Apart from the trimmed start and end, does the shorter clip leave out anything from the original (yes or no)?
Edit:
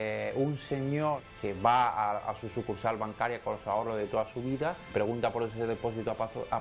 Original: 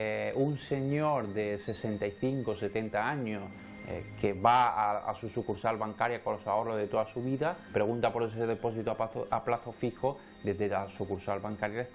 yes